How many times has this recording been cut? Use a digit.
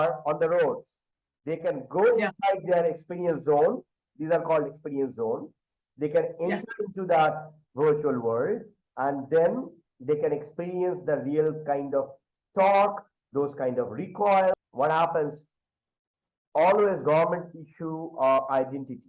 1